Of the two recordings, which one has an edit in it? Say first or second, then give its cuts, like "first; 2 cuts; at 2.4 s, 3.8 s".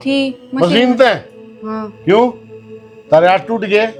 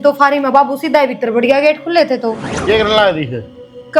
second; 1 cut; at 2.5 s